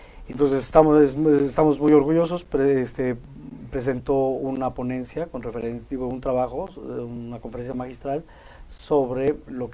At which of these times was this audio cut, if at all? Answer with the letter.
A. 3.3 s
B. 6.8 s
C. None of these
A